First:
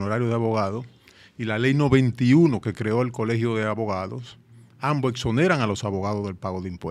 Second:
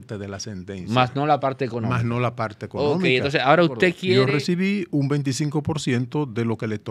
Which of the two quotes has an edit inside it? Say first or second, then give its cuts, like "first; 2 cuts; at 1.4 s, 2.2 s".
second; 1 cut; at 4.2 s